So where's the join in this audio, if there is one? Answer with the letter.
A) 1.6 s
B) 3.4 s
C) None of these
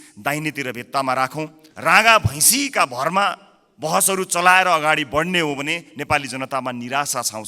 A